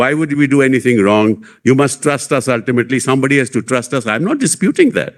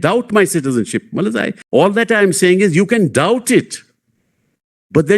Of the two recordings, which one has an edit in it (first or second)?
second